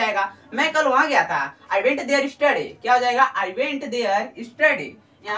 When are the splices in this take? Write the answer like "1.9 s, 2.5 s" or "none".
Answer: none